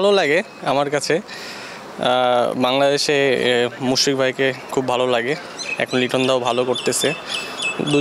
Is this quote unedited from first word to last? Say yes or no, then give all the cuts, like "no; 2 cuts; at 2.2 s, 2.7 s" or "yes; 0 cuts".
yes; 0 cuts